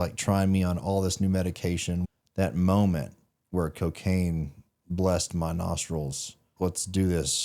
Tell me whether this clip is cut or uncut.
cut